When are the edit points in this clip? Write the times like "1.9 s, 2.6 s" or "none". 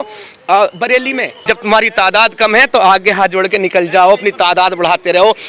1.3 s

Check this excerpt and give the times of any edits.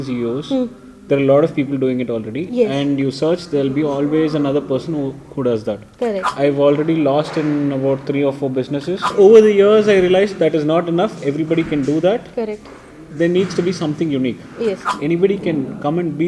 6.3 s, 9.1 s, 14.9 s

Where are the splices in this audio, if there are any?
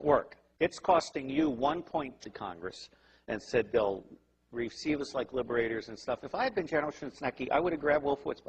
none

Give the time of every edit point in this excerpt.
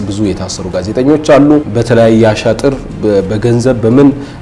1.7 s

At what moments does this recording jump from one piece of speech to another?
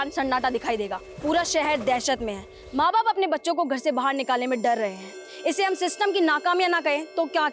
1.1 s

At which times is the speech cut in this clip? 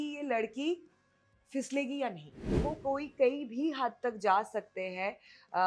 2.5 s

